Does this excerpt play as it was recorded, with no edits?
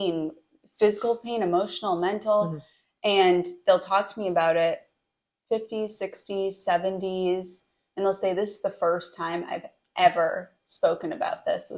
yes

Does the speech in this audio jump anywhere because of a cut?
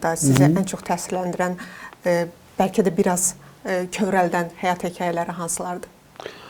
no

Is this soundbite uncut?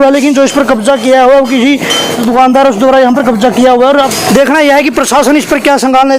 no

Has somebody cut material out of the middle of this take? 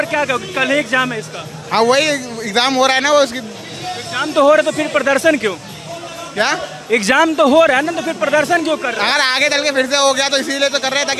no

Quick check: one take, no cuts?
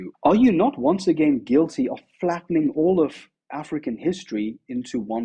yes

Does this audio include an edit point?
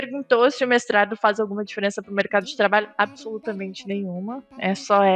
no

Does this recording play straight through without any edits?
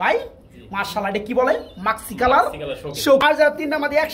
no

